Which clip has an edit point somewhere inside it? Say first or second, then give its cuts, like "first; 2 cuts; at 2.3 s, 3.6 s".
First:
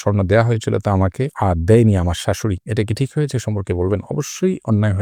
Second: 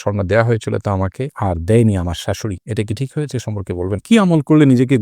second; 1 cut; at 4.0 s